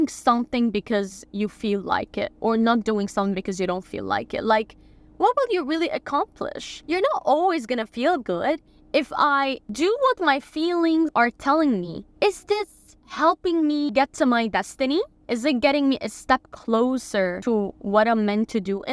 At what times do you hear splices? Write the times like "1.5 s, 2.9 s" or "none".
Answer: 6.7 s, 8.7 s, 11.1 s, 12.0 s, 13.9 s, 15.2 s, 17.4 s